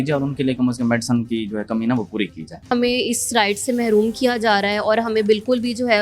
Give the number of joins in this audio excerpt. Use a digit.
1